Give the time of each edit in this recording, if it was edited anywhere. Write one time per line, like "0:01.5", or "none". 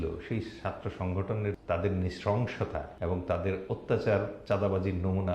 0:01.6
0:02.9